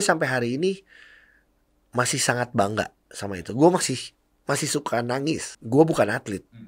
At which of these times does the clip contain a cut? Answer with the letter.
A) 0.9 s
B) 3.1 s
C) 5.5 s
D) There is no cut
C